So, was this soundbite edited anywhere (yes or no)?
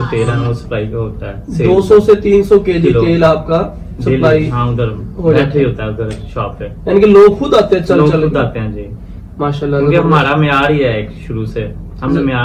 no